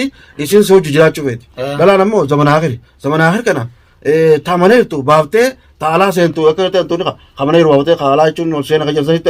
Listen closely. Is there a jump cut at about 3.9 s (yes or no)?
no